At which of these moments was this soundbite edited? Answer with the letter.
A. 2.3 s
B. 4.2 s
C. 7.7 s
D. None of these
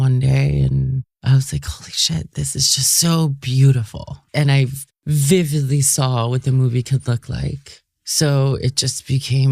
B